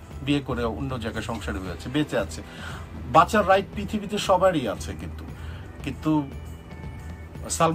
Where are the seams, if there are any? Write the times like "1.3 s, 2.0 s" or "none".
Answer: none